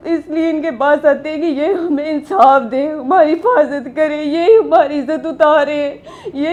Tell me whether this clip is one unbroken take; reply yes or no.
yes